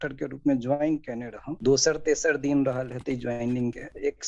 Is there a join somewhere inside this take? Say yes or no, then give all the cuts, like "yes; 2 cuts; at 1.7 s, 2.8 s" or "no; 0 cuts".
no; 0 cuts